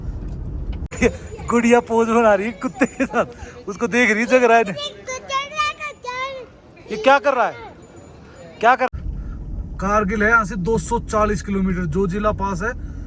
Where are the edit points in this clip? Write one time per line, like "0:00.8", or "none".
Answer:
0:00.9
0:09.4